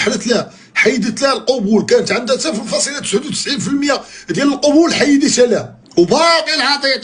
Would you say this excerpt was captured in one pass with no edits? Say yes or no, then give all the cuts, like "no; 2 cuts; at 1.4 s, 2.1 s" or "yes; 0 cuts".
no; 1 cut; at 5.8 s